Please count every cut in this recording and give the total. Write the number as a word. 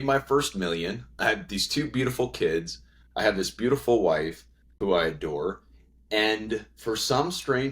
one